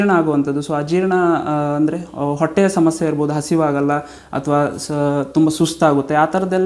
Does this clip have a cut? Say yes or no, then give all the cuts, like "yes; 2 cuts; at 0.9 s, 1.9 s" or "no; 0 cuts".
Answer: no; 0 cuts